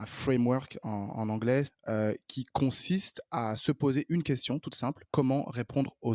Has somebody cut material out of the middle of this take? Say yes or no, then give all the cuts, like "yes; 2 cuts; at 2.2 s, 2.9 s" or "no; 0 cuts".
yes; 2 cuts; at 1.7 s, 5.0 s